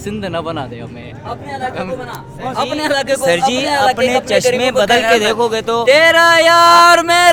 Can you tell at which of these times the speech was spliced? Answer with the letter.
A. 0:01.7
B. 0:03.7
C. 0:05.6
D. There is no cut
D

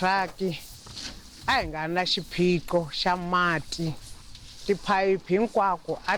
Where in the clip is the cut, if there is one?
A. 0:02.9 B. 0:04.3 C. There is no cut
C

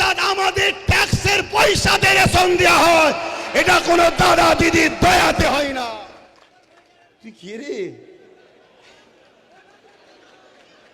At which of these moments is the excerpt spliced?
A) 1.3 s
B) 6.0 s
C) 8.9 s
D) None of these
B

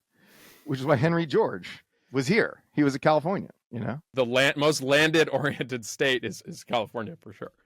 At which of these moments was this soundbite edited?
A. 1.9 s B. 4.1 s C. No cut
B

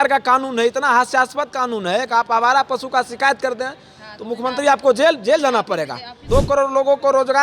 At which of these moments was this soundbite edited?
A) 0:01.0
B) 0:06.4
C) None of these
B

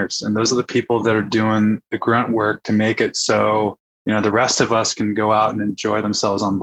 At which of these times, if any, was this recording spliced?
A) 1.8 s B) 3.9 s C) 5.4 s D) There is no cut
B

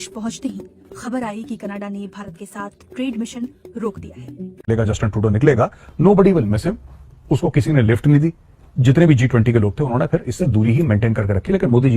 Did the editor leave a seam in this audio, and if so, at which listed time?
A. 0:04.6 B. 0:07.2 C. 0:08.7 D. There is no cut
A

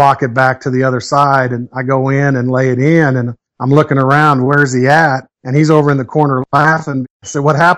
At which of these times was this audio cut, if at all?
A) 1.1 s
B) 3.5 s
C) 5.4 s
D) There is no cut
D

